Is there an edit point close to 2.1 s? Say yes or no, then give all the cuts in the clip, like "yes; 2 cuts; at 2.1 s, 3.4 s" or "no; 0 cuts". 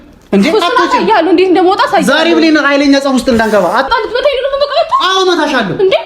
no; 1 cut; at 3.9 s